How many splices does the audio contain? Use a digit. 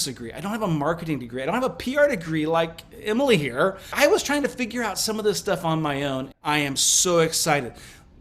2